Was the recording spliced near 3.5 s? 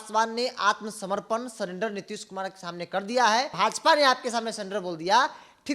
yes; 1 cut; at 3.5 s

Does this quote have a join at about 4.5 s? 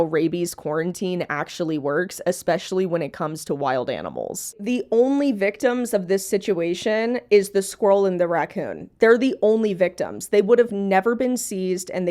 yes; 1 cut; at 4.5 s

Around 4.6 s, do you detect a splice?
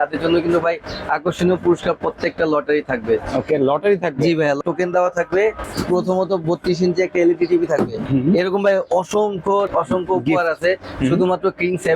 yes; 3 cuts; at 4.6 s, 5.6 s, 8.0 s

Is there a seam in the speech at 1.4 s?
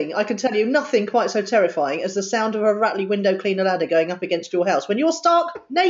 no; 0 cuts

